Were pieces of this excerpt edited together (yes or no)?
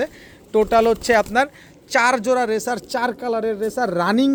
no